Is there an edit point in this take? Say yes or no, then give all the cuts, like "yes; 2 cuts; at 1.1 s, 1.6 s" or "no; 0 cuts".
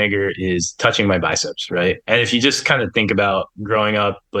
no; 0 cuts